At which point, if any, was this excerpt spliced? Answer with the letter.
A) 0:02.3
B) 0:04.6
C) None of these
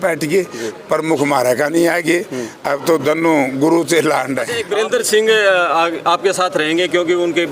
B